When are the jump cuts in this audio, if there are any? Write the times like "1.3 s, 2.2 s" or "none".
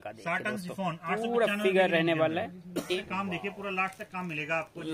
3.0 s